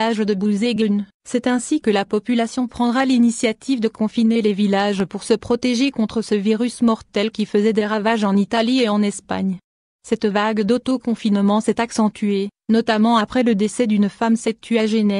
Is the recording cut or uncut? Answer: cut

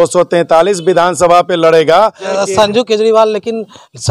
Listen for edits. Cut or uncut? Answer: cut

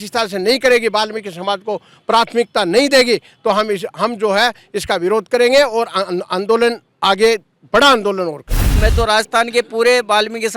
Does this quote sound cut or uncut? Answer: cut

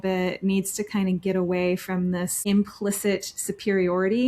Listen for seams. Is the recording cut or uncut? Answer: cut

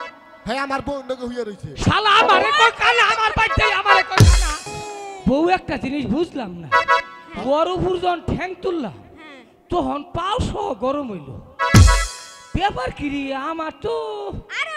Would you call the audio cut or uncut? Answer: cut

